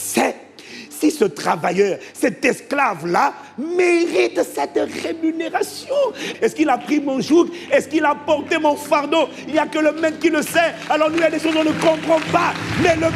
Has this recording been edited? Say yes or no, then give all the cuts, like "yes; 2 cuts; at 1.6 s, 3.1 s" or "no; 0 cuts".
yes; 1 cut; at 6.3 s